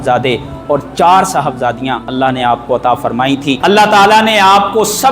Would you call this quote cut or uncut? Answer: cut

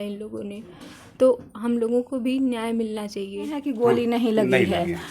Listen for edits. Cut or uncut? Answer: cut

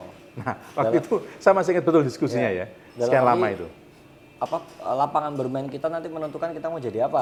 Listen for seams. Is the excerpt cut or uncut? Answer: uncut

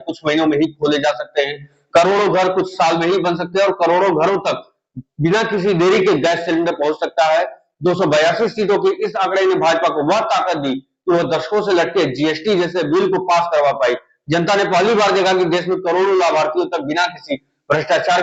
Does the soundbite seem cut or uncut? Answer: uncut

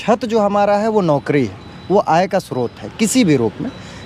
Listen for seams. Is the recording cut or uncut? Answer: uncut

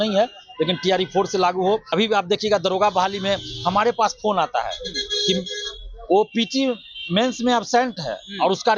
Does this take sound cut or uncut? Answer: cut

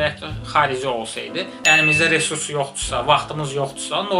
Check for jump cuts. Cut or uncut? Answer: cut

